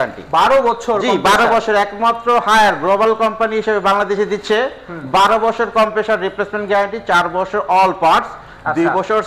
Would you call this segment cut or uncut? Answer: uncut